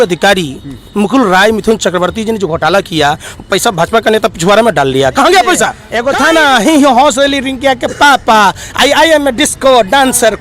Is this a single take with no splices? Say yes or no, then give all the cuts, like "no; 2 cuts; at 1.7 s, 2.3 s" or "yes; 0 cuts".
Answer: no; 1 cut; at 5.8 s